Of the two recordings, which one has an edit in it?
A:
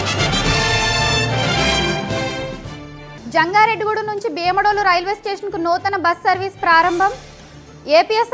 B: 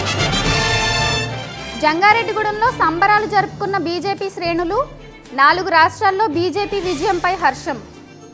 B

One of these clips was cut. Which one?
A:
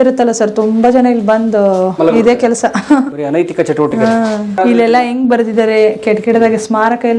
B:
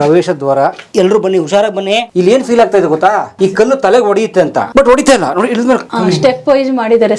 B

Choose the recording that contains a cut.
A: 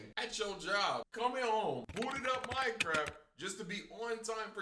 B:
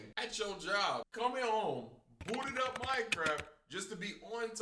A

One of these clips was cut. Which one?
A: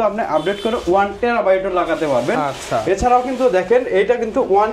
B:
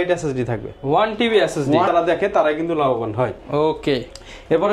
B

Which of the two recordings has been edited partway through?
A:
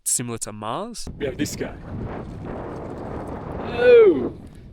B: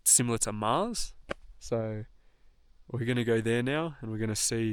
A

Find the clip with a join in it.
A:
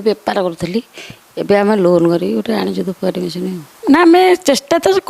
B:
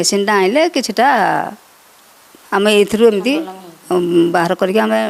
A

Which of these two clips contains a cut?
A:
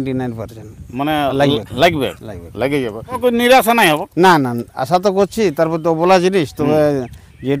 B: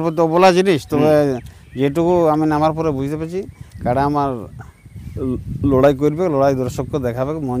A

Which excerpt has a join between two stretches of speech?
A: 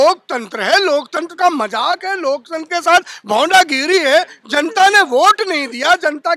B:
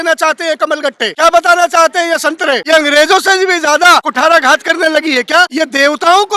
B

